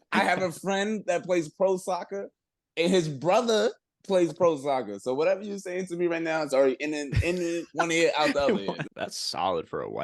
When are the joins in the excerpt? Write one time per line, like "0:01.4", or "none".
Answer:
0:08.8